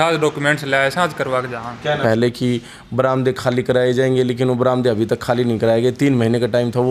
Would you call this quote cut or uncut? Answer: cut